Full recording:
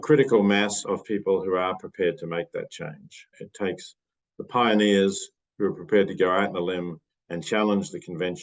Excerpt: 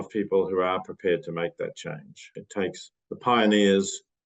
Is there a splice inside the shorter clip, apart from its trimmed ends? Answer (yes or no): yes